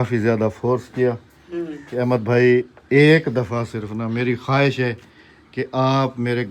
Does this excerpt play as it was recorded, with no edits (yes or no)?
yes